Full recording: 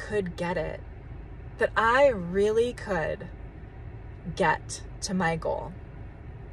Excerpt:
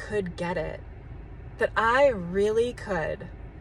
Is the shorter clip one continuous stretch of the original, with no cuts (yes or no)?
yes